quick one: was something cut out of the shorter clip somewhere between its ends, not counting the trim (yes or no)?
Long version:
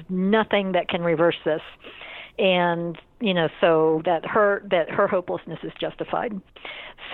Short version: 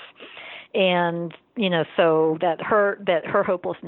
no